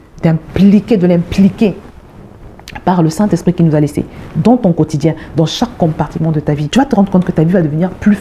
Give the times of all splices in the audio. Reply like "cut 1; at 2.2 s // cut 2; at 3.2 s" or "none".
cut 1; at 6.6 s